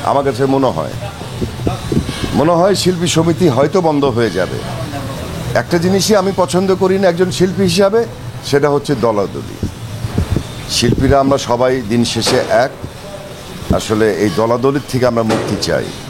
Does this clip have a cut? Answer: no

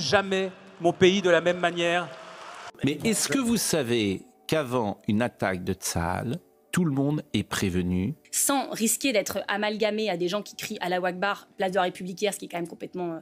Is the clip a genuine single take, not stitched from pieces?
no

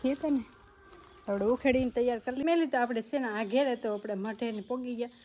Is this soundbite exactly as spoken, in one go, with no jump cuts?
no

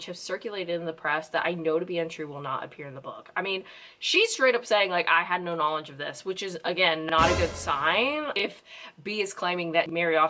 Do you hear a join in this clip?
yes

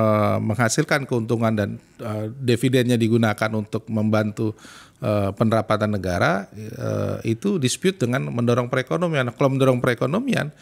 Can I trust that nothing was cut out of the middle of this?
yes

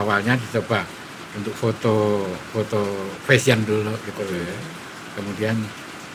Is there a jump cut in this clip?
no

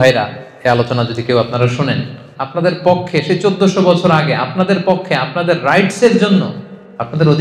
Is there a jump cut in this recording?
yes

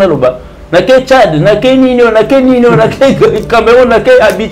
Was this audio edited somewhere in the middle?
no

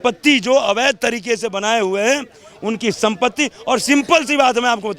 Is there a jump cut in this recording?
no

